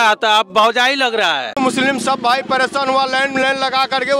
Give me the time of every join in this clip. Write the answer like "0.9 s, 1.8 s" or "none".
1.6 s